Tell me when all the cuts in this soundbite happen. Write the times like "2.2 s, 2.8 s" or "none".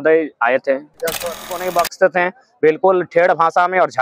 1.7 s